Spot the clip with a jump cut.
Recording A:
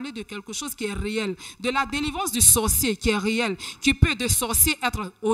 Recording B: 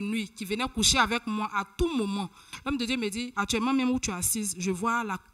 B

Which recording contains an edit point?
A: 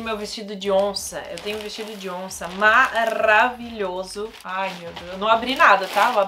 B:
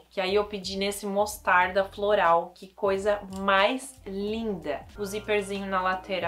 B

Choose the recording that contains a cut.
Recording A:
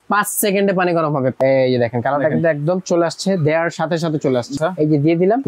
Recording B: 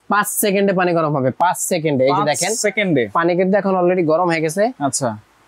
A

